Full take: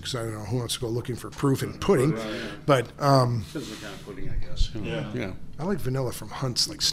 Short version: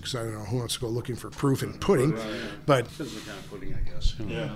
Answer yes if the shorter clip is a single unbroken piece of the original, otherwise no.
no